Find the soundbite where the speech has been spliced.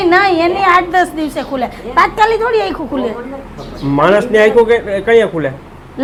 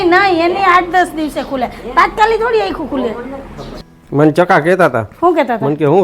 second; 1 cut; at 3.7 s

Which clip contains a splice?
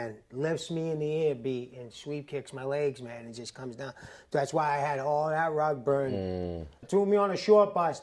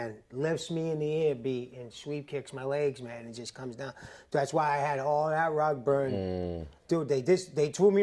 first; 1 cut; at 6.7 s

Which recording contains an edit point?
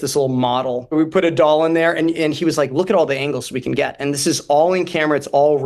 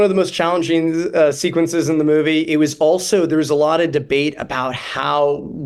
first; 1 cut; at 0.9 s

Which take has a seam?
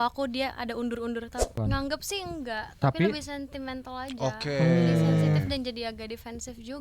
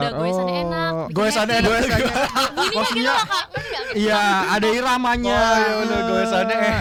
first; 1 cut; at 1.5 s

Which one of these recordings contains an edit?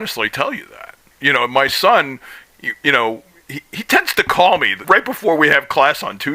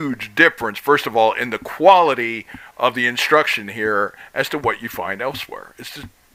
first; 2 cuts; at 1.1 s, 4.7 s

